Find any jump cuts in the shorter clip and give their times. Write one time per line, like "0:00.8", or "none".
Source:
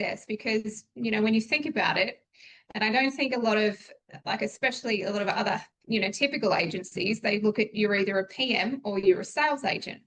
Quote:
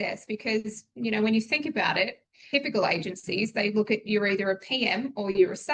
0:02.4